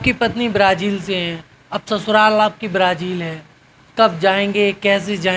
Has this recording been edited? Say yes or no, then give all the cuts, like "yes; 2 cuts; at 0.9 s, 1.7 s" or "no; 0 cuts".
no; 0 cuts